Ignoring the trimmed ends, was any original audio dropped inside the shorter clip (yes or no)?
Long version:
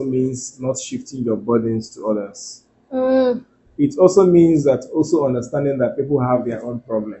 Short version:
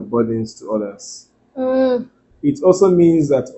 no